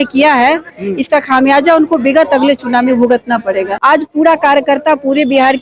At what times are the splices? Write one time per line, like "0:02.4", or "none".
0:03.7